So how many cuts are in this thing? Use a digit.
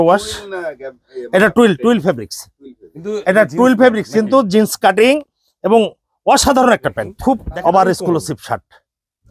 1